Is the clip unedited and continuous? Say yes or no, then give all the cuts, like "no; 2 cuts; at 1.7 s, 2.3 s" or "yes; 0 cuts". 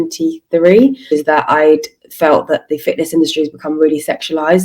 no; 1 cut; at 1.1 s